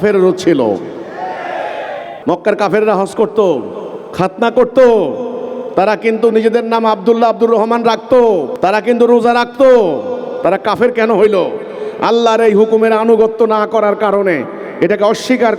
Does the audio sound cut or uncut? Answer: cut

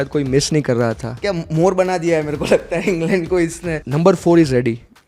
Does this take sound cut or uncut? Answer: cut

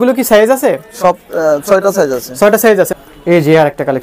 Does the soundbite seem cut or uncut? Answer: cut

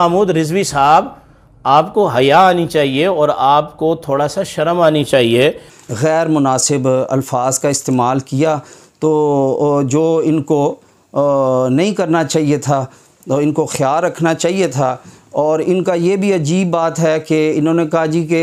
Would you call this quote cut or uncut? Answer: uncut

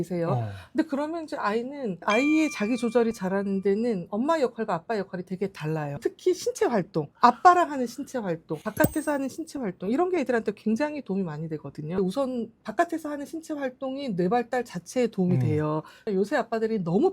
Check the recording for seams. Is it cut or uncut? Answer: cut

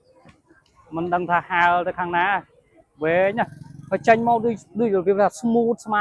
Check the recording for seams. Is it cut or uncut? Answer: uncut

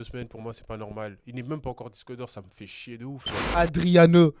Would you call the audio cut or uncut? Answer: cut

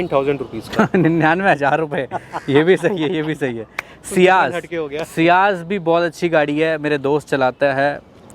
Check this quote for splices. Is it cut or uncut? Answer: uncut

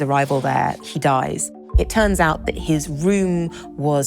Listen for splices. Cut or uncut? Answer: cut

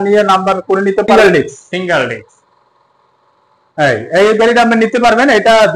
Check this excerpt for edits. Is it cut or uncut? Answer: cut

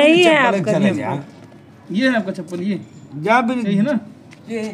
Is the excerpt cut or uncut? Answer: uncut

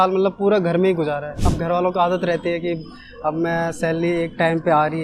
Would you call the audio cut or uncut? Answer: cut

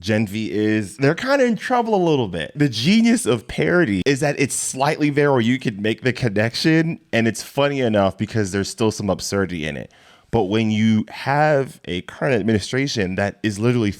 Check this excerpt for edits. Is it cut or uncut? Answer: cut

